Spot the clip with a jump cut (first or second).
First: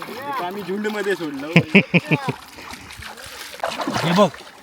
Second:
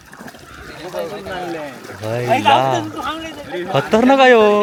first